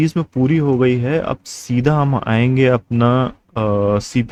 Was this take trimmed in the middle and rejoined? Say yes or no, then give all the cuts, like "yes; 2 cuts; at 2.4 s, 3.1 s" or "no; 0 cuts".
no; 0 cuts